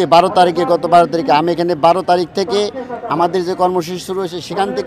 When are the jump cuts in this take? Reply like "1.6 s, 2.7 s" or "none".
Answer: none